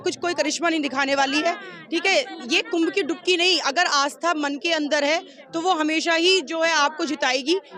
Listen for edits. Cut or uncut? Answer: uncut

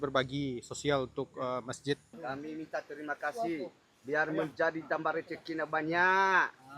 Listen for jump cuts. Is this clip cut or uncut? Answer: cut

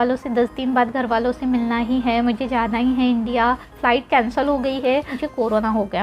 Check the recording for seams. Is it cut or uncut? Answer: cut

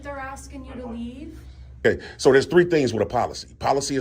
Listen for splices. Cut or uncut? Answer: cut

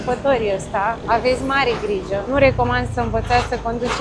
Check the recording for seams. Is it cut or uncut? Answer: cut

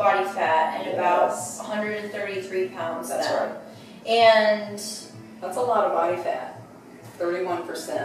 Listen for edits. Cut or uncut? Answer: uncut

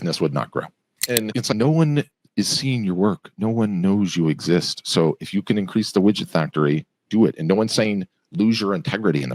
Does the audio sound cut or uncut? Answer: cut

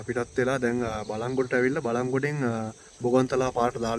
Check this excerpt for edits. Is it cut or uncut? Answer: uncut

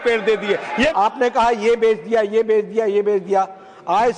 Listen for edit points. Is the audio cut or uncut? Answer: cut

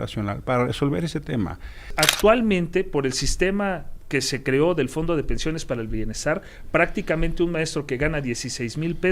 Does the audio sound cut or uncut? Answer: cut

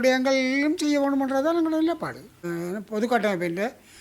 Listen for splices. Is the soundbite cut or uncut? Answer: cut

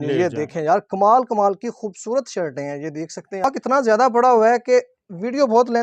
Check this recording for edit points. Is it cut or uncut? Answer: cut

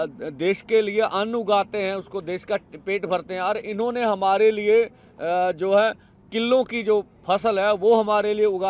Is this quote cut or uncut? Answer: uncut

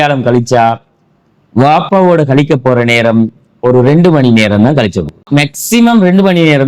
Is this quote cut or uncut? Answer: cut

